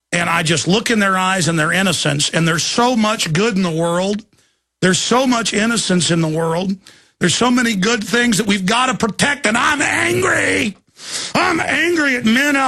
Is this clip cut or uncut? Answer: uncut